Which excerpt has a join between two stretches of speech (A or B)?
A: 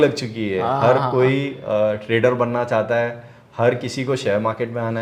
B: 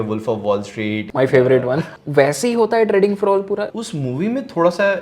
B